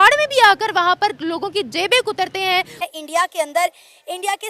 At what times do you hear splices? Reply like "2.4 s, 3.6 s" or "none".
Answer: 2.8 s